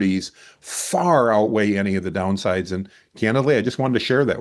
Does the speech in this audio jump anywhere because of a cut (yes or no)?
no